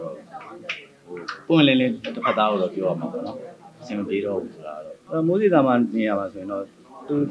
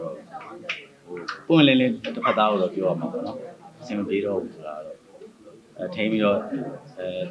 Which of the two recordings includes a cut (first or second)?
first